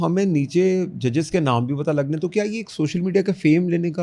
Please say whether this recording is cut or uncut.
uncut